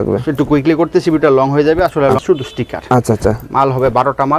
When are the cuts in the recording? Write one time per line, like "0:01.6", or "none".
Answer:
0:02.2